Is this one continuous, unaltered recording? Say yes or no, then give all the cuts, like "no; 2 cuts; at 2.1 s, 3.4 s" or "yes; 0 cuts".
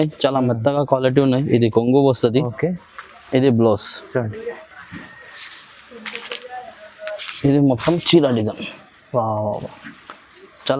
yes; 0 cuts